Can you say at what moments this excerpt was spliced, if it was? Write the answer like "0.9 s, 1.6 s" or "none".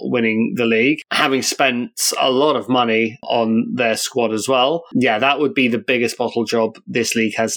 4.8 s